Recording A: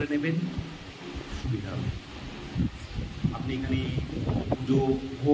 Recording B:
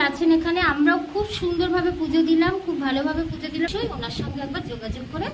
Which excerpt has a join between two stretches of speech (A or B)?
B